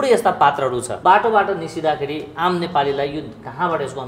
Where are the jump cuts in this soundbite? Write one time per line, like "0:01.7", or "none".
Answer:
0:00.9